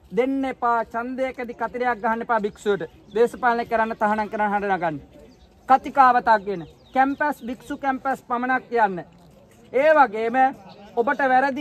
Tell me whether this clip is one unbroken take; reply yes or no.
yes